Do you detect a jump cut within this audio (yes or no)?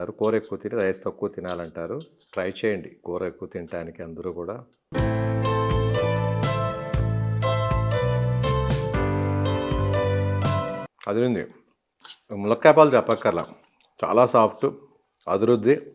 yes